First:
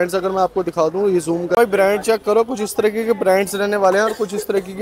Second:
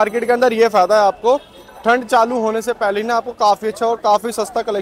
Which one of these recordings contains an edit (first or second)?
first